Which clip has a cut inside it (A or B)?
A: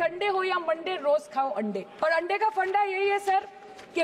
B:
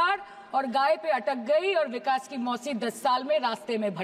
A